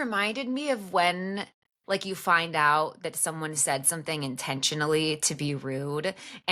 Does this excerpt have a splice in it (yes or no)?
no